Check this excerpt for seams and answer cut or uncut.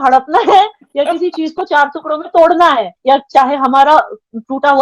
cut